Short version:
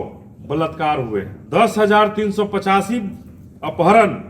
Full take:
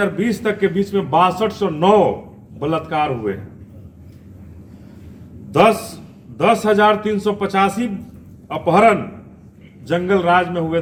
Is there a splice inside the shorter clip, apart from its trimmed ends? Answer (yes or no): yes